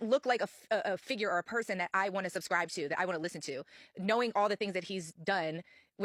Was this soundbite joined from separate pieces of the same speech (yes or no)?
no